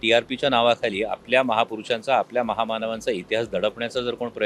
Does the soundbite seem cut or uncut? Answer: uncut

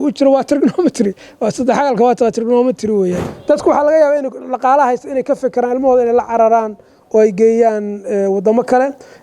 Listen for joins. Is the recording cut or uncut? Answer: cut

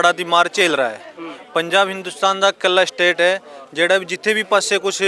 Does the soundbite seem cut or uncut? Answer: uncut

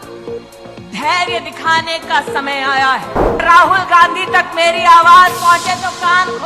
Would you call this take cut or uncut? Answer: cut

